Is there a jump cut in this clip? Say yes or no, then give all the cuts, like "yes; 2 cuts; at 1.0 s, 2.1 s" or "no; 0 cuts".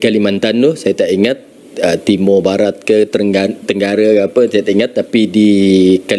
no; 0 cuts